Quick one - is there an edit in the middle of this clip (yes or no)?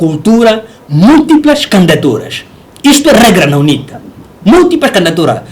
no